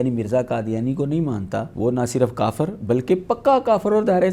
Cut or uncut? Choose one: cut